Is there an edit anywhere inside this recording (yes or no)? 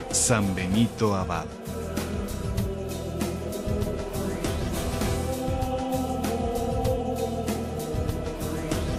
no